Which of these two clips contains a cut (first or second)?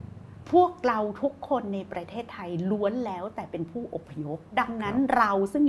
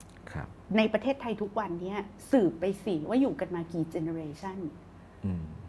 first